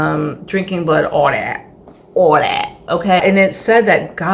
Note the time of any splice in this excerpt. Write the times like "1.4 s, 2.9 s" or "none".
3.2 s